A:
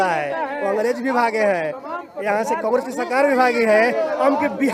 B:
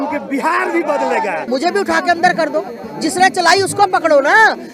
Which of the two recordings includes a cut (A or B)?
B